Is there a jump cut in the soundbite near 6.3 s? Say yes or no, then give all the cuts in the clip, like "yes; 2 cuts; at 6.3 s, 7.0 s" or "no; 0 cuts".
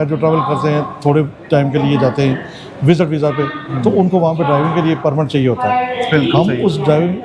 no; 0 cuts